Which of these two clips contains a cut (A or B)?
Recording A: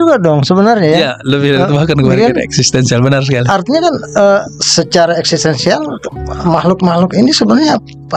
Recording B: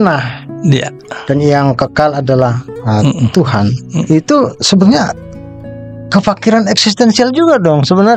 B